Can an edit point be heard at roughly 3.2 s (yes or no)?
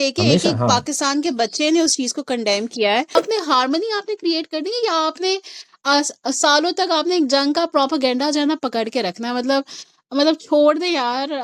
yes